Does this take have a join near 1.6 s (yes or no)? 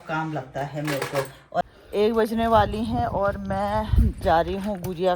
yes